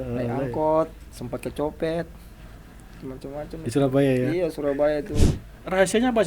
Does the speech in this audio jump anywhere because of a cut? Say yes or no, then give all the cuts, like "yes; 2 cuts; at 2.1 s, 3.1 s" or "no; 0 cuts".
yes; 1 cut; at 5.3 s